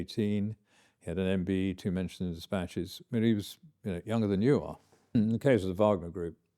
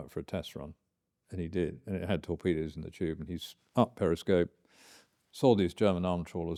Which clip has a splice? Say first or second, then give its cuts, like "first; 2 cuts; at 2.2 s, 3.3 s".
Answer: first; 1 cut; at 5.1 s